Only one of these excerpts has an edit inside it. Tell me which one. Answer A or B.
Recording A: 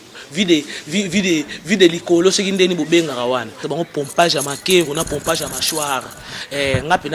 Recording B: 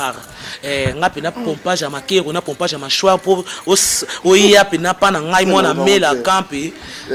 A